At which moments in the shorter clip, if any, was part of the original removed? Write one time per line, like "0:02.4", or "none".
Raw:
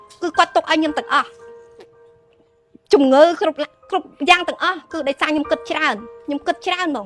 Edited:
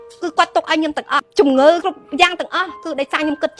0:01.3
0:01.8